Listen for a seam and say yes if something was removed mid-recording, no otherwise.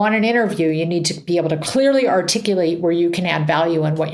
yes